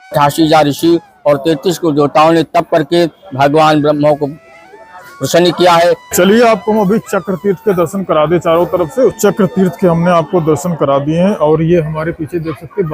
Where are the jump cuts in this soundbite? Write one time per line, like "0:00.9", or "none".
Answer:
0:06.0
0:09.2